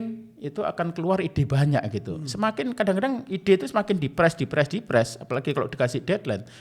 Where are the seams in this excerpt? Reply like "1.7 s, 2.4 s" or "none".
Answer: none